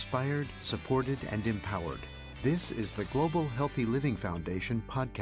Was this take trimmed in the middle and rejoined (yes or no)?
no